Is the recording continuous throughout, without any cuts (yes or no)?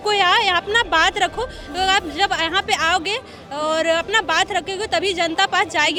yes